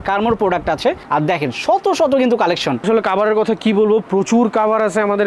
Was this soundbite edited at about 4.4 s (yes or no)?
no